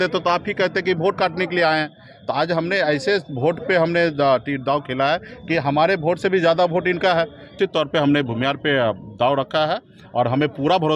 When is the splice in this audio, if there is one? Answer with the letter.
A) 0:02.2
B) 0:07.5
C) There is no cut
B